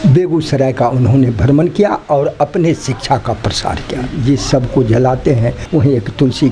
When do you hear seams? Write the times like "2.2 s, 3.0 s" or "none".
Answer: 4.0 s, 5.6 s